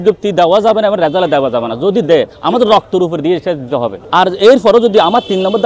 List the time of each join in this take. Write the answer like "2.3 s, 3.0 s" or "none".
4.0 s